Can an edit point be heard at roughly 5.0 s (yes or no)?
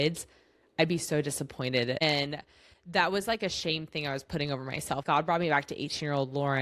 yes